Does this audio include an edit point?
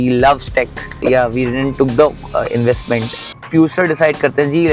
yes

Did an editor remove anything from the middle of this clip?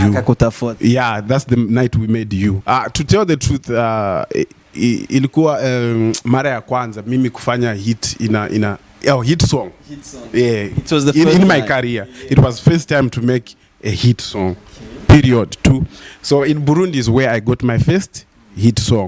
yes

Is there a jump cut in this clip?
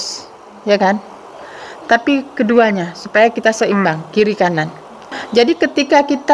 yes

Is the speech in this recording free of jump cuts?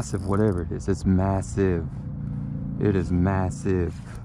yes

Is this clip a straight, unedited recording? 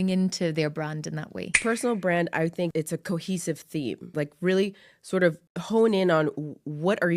no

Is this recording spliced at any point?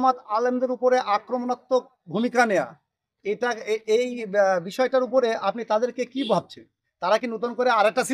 no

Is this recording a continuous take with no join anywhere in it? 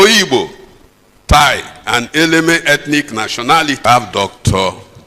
no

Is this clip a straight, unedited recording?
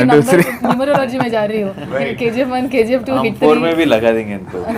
yes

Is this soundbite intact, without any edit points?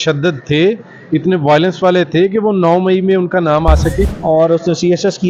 no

